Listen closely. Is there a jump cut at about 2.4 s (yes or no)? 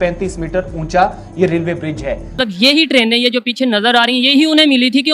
yes